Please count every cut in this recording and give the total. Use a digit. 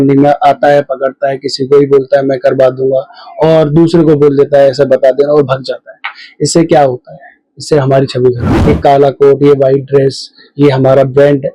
1